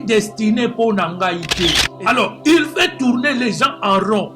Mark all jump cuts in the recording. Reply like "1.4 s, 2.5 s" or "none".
1.9 s